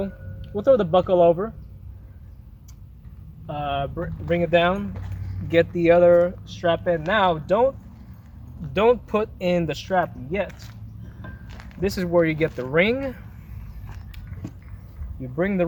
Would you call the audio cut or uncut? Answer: uncut